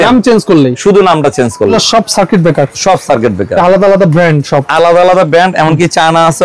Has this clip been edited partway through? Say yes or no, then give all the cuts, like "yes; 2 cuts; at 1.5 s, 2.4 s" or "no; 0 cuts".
yes; 1 cut; at 1.7 s